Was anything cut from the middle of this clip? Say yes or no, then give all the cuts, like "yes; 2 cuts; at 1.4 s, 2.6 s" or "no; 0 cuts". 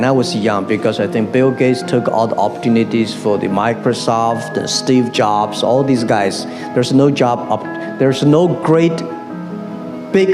no; 0 cuts